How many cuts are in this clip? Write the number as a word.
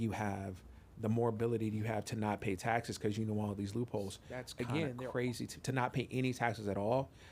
one